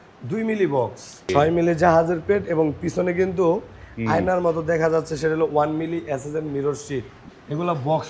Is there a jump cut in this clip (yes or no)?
yes